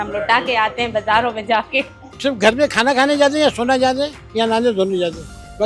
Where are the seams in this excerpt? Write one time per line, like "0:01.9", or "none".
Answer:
0:02.1